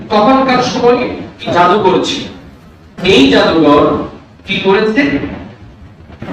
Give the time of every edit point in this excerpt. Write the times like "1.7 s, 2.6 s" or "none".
1.4 s